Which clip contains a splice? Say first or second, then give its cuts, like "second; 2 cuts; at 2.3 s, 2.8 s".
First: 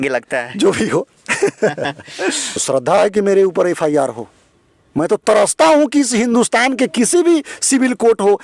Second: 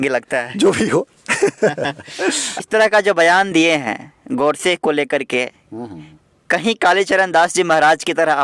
first; 1 cut; at 2.6 s